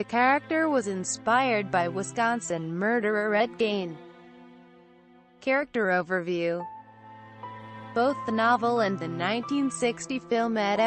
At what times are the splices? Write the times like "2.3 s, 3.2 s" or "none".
2.4 s